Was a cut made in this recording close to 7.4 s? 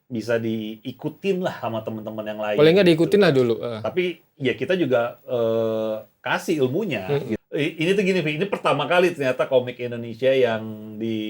yes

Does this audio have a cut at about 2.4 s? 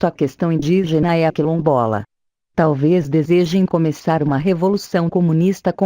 yes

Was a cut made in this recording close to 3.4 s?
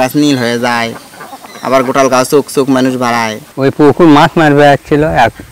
yes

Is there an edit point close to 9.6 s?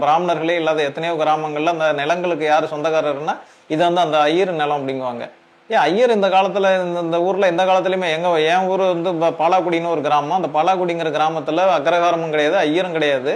no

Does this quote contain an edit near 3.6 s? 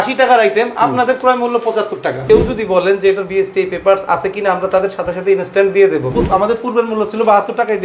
no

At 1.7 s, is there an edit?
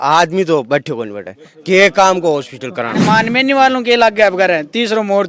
no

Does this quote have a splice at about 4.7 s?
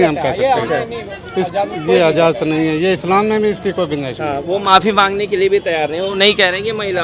no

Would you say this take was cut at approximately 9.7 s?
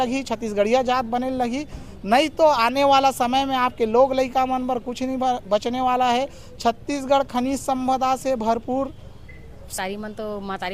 yes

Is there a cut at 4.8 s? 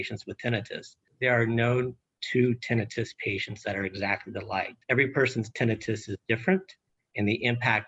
yes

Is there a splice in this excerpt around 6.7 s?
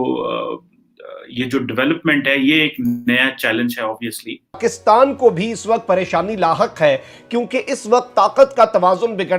no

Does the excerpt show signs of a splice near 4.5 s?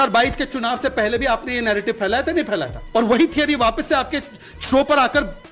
no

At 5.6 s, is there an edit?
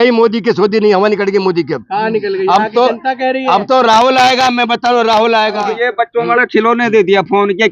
yes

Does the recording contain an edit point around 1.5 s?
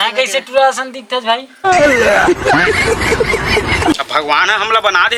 no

